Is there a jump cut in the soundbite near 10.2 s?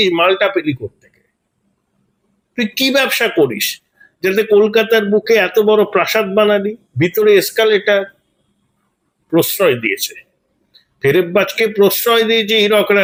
no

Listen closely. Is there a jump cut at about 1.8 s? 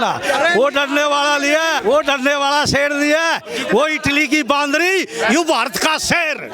yes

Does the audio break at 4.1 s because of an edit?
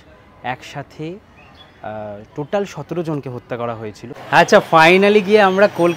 yes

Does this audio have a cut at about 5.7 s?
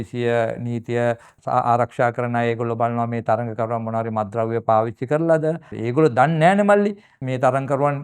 yes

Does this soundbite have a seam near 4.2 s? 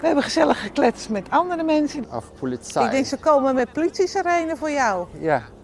no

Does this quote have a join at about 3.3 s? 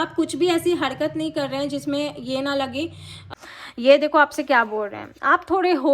yes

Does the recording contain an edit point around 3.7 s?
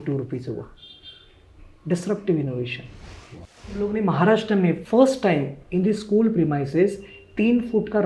yes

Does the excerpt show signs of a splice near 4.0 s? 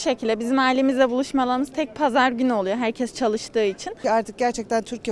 yes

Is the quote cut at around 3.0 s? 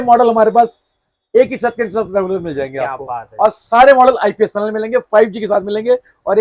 no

